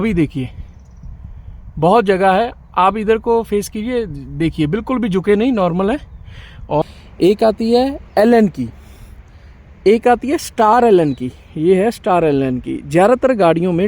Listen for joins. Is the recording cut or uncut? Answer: cut